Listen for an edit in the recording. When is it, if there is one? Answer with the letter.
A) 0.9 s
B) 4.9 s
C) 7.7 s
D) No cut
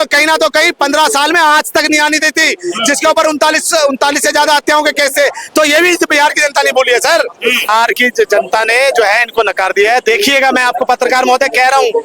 C